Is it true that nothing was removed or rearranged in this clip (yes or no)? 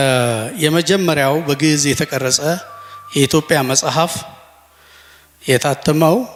yes